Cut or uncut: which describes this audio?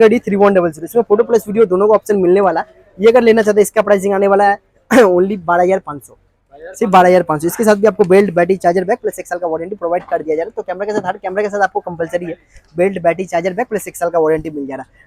uncut